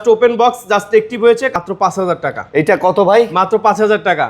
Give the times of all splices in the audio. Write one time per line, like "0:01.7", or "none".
0:01.5